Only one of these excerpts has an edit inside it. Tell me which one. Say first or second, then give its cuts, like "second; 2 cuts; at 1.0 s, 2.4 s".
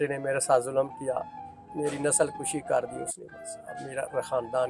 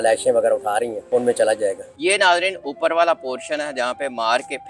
second; 2 cuts; at 1.0 s, 1.9 s